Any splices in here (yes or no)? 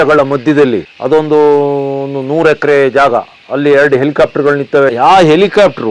yes